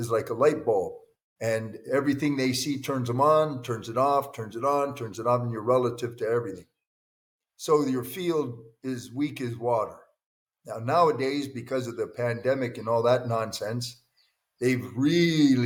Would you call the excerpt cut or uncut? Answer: uncut